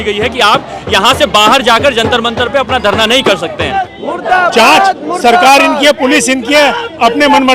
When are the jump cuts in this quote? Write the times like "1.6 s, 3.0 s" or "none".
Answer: 3.8 s